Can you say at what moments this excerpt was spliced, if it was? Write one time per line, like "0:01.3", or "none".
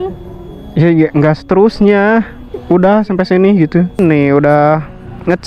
0:04.0

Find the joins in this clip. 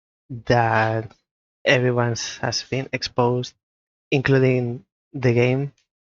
none

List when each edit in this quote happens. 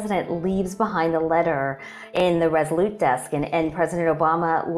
0:02.2

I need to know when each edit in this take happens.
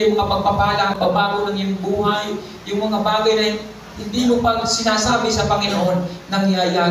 0:00.9

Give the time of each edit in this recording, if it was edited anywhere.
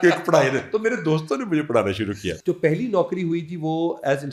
0:02.3

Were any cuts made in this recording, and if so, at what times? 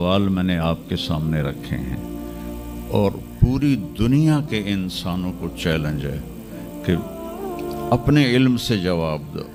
none

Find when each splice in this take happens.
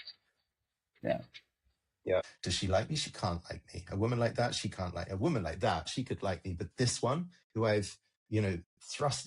0:02.2

